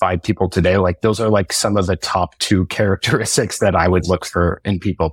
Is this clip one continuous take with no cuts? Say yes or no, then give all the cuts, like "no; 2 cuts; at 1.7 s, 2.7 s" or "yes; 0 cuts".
yes; 0 cuts